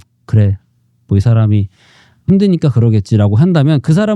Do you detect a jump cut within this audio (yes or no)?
yes